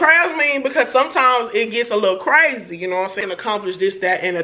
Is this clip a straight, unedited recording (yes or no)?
no